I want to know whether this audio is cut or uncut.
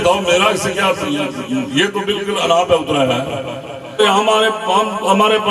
cut